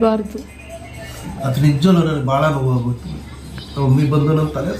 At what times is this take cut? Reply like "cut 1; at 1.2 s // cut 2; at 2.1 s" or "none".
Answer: none